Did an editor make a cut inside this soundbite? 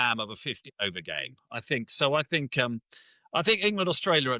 no; 0 cuts

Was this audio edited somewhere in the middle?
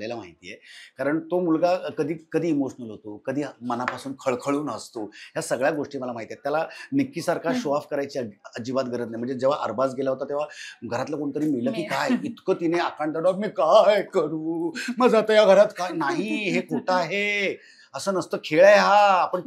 no; 0 cuts

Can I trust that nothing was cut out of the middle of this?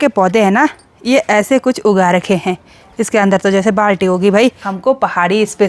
no; 1 cut; at 4.7 s

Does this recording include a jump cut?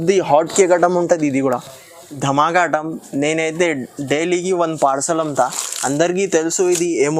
yes; 1 cut; at 2.0 s

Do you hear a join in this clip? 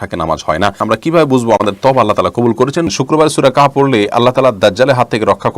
yes; 2 cuts; at 0.8 s, 2.9 s

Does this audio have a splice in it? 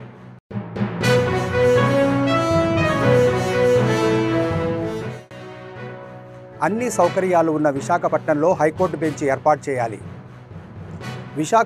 yes; 1 cut; at 6.6 s

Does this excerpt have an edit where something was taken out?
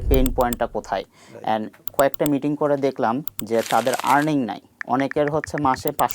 yes; 2 cuts; at 1.9 s, 3.2 s

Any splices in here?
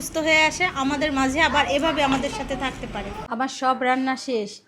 yes; 1 cut; at 3.2 s

